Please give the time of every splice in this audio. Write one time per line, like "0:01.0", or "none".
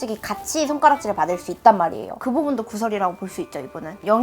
0:02.1

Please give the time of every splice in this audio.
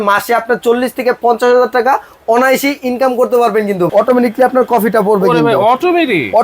0:03.9

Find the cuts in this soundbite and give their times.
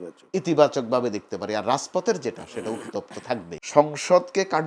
0:03.5

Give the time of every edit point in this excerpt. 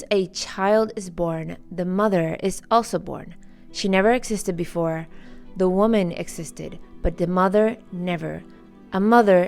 none

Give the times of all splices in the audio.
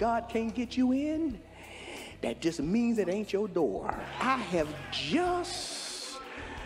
0:04.1

